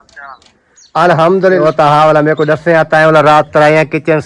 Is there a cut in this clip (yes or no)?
yes